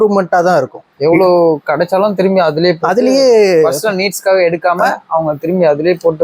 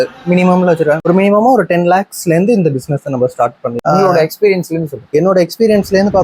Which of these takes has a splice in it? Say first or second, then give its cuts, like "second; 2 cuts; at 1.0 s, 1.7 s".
second; 2 cuts; at 1.0 s, 3.7 s